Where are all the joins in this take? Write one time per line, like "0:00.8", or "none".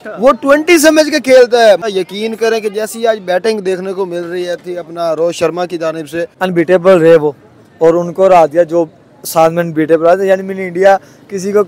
0:01.9
0:06.3